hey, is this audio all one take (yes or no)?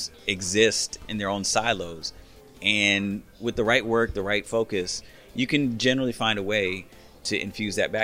no